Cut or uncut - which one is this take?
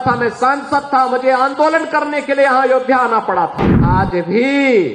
cut